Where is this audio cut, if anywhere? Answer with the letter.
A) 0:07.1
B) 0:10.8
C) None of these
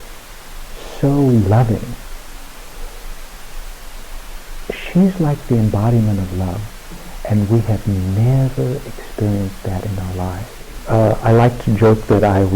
B